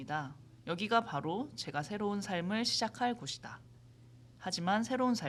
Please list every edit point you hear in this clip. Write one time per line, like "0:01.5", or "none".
none

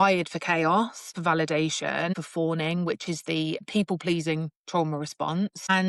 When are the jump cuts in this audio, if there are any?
0:01.2

